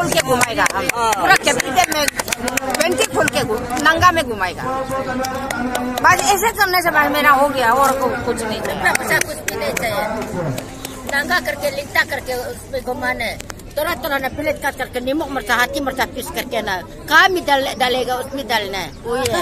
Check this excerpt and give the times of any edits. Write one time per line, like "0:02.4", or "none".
none

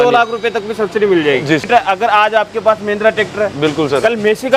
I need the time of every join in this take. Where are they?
0:01.6

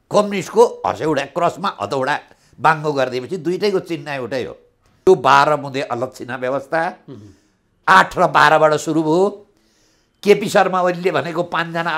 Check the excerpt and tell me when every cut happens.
0:05.1

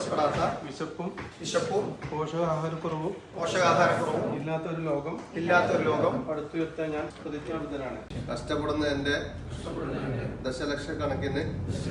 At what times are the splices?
0:07.1
0:08.1

